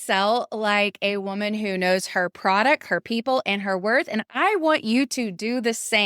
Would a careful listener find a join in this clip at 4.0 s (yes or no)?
no